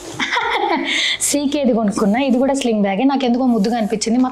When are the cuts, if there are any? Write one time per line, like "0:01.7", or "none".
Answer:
none

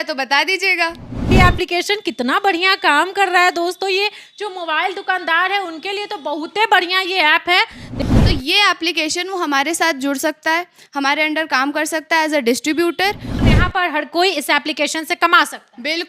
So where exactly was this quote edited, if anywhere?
0:01.3
0:07.9
0:13.3

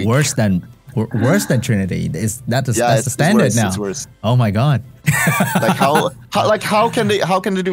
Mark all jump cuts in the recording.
0:05.0

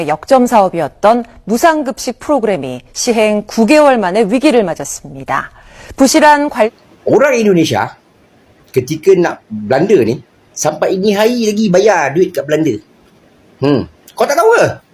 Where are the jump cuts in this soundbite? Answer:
0:06.7

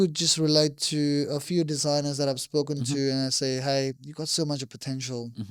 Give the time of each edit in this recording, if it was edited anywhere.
none

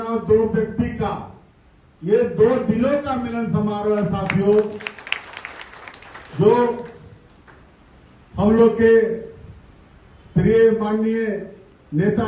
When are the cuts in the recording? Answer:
none

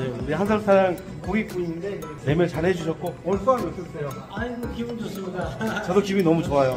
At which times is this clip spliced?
none

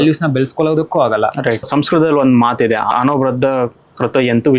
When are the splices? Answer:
0:01.7
0:02.9

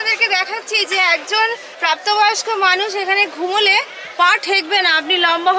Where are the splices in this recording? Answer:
0:01.7

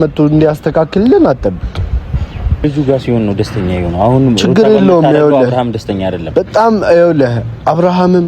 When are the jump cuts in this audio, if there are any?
0:02.6

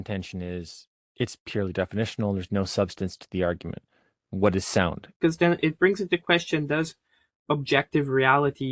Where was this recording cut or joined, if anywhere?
0:05.0

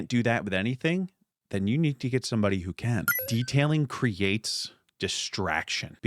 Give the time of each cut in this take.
0:03.2

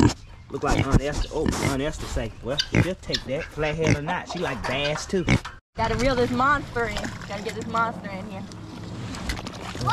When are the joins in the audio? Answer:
0:05.6

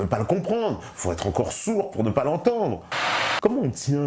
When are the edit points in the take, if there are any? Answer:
0:03.1

